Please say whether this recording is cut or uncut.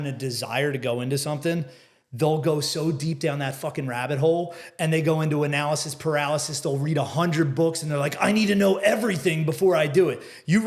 uncut